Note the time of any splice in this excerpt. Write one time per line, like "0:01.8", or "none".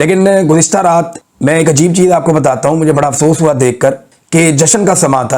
0:01.2
0:04.1